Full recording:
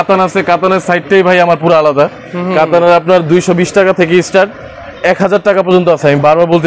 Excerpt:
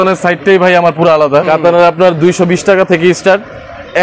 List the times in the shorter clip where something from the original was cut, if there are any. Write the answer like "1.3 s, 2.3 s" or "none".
1.5 s